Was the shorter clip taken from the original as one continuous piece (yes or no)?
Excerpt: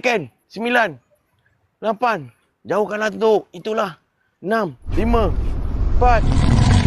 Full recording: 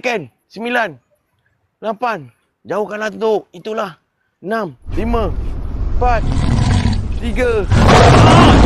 yes